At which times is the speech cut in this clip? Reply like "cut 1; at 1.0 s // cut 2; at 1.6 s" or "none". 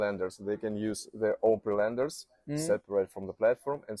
none